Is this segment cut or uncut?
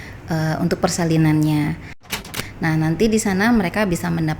cut